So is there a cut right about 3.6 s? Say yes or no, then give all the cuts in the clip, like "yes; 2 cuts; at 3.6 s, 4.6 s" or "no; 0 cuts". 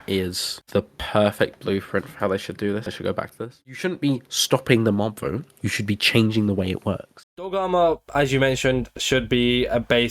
yes; 2 cuts; at 3.6 s, 7.1 s